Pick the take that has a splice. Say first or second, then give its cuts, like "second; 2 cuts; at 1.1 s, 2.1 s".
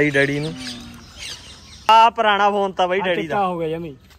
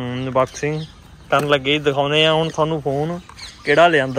first; 1 cut; at 1.9 s